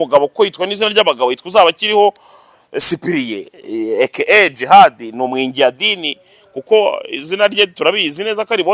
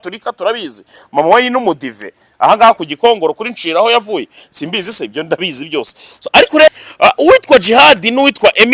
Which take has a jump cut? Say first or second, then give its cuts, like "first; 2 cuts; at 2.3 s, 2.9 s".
second; 1 cut; at 6.7 s